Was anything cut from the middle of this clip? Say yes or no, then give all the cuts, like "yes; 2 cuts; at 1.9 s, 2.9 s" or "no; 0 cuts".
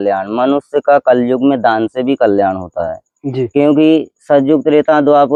no; 0 cuts